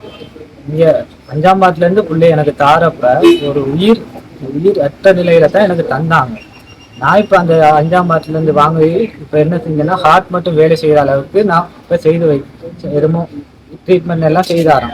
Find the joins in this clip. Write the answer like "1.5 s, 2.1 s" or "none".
none

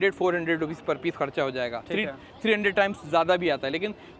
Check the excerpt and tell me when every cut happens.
none

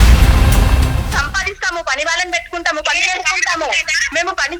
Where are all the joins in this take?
1.0 s

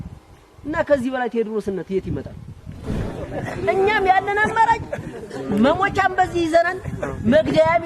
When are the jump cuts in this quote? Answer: 2.8 s

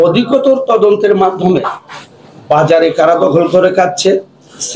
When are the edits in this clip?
none

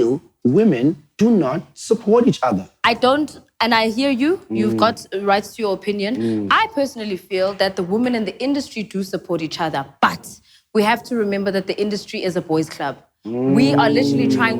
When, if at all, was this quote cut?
2.7 s

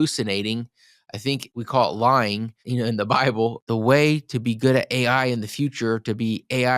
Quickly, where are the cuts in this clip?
1.5 s, 2.6 s, 3.6 s

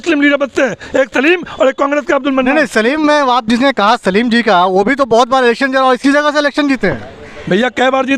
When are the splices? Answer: none

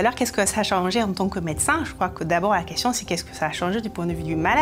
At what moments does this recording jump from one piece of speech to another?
none

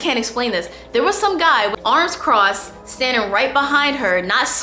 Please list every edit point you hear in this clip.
1.7 s

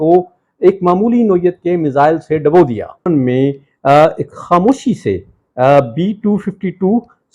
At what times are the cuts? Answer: 3.1 s

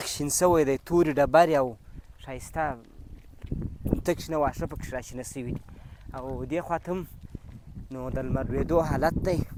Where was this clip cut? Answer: none

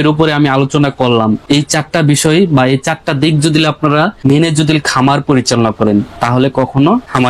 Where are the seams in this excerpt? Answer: none

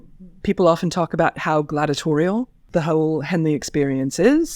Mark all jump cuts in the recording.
2.6 s

